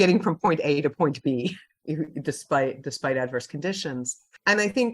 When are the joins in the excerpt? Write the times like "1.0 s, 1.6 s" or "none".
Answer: 1.7 s

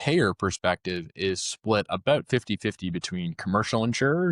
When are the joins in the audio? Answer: none

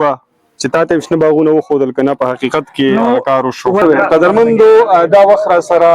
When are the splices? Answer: 3.8 s

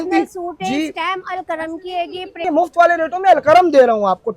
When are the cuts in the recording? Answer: 2.4 s

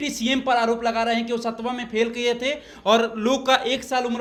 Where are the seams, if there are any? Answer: none

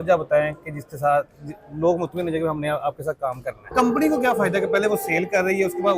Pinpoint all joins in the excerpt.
3.5 s

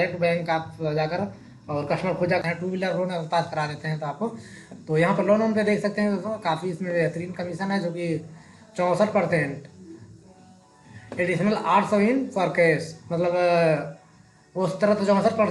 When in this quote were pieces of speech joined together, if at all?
2.4 s

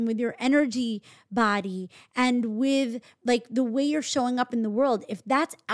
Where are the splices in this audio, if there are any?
none

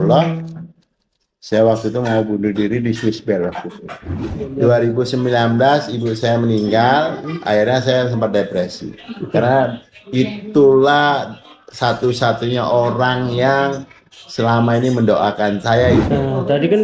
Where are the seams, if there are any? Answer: 4.4 s, 16.1 s

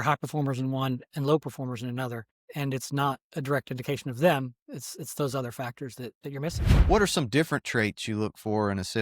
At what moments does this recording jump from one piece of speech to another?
6.7 s

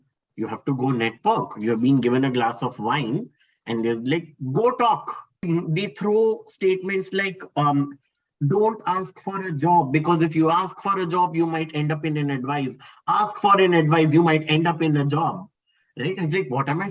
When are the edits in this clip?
5.4 s

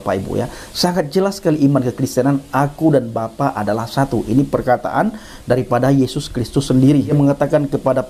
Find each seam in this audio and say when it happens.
none

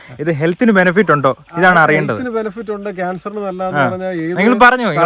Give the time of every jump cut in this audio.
none

